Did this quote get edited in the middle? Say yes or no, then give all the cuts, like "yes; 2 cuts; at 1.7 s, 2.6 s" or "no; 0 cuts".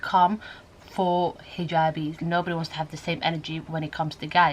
yes; 1 cut; at 2.2 s